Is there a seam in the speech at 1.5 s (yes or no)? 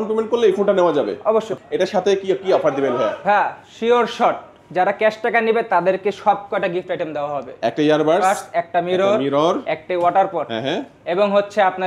yes